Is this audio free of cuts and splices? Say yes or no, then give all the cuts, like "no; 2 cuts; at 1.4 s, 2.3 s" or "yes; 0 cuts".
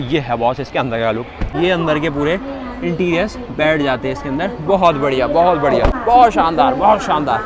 no; 2 cuts; at 1.5 s, 6.0 s